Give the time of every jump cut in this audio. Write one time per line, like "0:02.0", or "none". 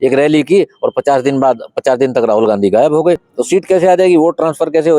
0:03.3